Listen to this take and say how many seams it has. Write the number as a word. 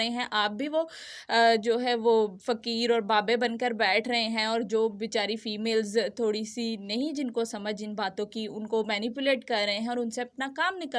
zero